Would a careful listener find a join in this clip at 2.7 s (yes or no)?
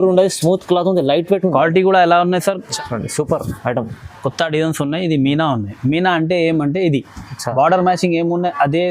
yes